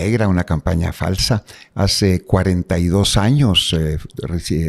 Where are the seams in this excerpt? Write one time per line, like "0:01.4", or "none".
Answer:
none

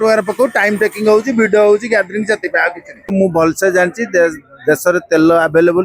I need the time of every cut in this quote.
0:03.1

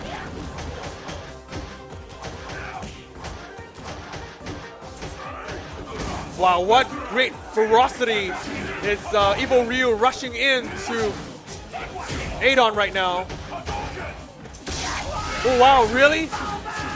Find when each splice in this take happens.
0:09.2

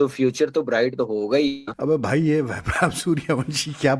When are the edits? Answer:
0:01.7

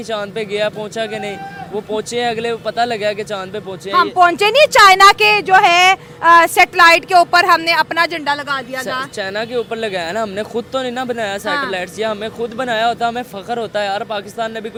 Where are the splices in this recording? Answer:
none

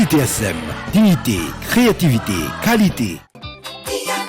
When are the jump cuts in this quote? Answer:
0:03.3

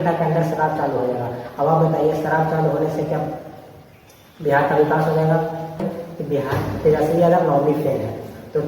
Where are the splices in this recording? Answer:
0:06.0

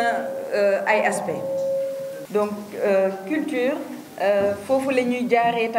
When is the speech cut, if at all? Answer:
0:02.2

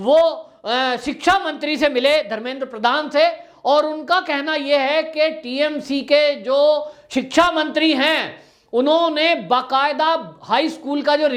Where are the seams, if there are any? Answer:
none

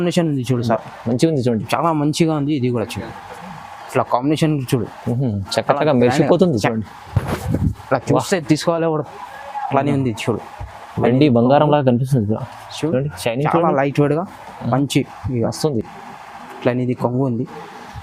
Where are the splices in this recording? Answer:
none

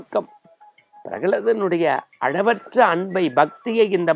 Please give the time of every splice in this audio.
none

